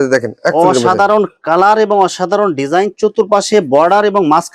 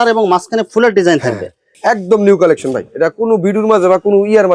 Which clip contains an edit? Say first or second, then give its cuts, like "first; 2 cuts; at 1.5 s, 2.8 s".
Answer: second; 1 cut; at 1.6 s